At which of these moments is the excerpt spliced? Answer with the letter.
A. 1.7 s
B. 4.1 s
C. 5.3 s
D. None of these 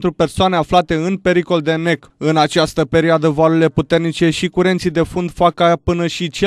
D